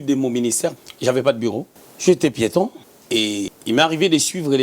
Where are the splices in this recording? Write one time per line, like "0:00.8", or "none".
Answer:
0:00.8
0:03.5